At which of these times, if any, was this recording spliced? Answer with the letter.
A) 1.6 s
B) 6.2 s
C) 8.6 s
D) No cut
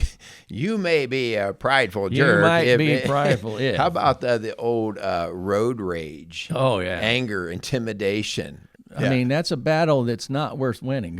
C